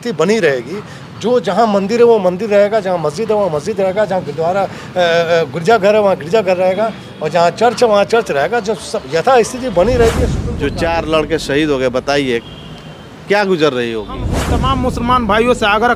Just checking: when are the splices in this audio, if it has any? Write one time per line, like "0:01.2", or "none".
0:10.4
0:14.4